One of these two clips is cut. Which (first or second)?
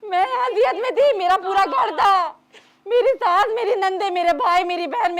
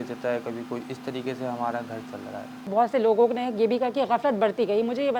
second